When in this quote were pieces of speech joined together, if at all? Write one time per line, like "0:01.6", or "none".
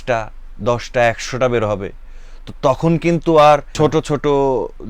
0:03.7